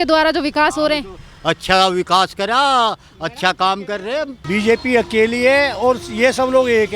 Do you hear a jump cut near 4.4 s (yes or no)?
yes